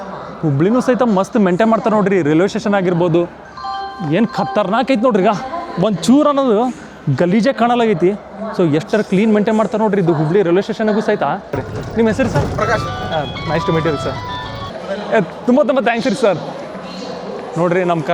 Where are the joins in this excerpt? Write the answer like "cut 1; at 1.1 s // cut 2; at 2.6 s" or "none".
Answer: cut 1; at 11.5 s

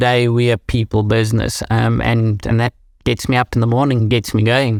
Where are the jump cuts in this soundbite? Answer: none

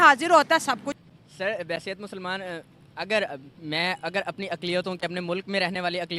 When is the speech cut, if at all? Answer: cut 1; at 0.9 s

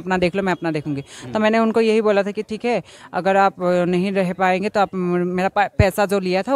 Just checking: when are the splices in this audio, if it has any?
none

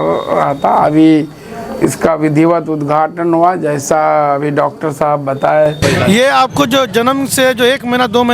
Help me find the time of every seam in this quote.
cut 1; at 5.8 s

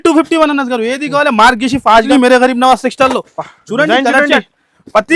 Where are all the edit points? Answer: cut 1; at 2.1 s

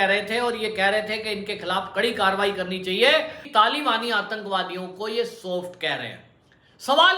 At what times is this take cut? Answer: cut 1; at 3.4 s

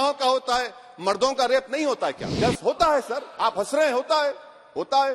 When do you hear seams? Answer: cut 1; at 2.2 s

